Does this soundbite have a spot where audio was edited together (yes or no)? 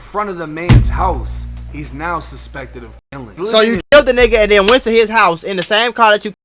yes